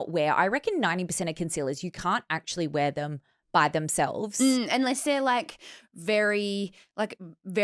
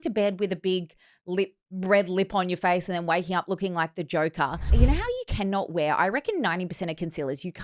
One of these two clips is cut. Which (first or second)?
second